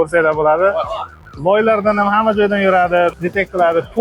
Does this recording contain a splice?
no; 0 cuts

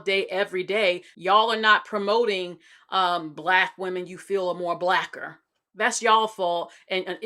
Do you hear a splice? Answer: yes; 1 cut; at 1.1 s

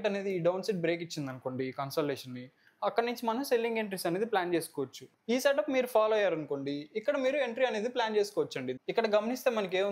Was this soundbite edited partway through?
yes; 2 cuts; at 5.0 s, 8.7 s

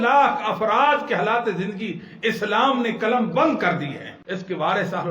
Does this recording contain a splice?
yes; 1 cut; at 4.1 s

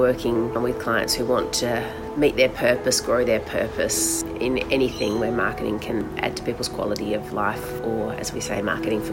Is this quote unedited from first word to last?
yes; 0 cuts

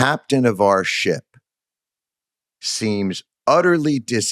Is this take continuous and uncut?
yes; 0 cuts

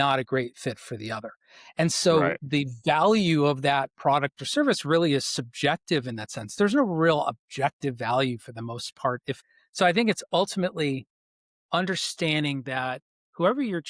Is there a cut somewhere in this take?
yes; 1 cut; at 9.4 s

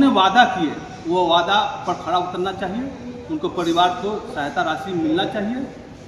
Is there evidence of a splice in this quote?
no; 0 cuts

